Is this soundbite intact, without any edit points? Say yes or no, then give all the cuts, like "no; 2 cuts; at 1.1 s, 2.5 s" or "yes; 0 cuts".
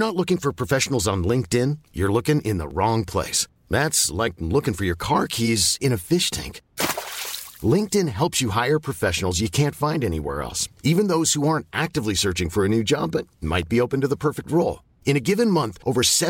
yes; 0 cuts